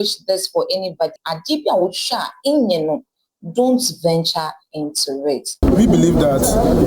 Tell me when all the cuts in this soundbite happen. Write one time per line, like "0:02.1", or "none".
0:01.3
0:05.6